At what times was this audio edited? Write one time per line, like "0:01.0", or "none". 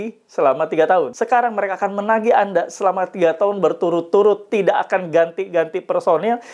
0:01.2